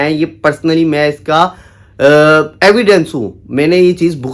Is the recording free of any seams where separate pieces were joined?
yes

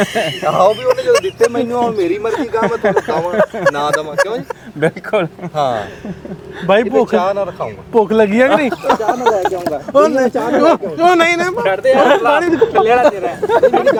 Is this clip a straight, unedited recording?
yes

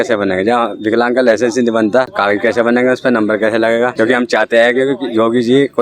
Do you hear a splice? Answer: yes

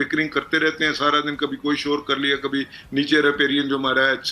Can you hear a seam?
no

